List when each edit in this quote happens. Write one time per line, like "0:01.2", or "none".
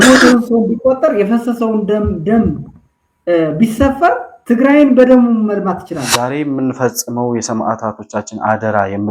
0:06.1